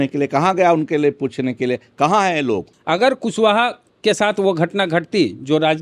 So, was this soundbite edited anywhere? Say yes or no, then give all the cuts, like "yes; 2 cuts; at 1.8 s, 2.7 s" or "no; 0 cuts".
yes; 2 cuts; at 2.7 s, 3.8 s